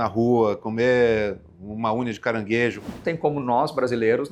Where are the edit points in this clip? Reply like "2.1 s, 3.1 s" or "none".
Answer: 2.9 s

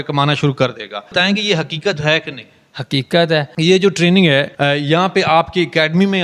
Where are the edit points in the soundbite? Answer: 1.1 s, 3.5 s, 4.5 s

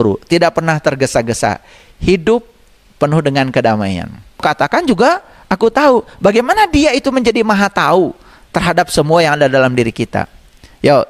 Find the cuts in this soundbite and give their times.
4.4 s

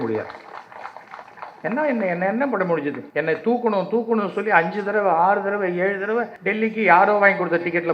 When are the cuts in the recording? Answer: 3.0 s, 6.4 s

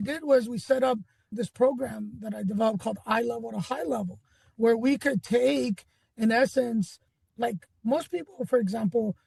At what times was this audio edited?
none

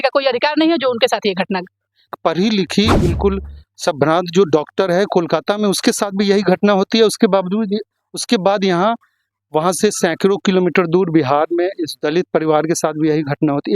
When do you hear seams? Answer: 2.1 s

